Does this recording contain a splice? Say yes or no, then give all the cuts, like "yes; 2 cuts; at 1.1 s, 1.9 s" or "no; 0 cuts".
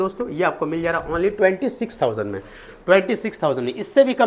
no; 0 cuts